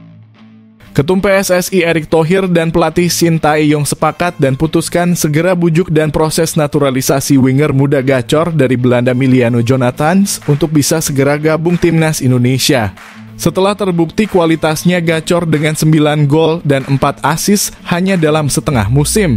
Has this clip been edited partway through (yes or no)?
yes